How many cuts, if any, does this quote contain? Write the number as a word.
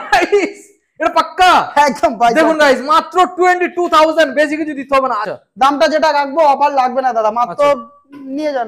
one